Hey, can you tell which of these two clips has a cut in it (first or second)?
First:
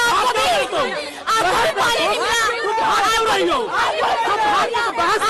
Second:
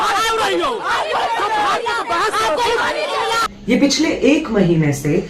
second